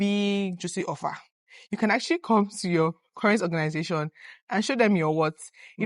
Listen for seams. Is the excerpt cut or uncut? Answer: uncut